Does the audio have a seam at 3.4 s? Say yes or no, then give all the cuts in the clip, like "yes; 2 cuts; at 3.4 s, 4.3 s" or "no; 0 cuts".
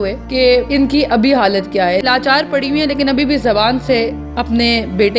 no; 1 cut; at 2.0 s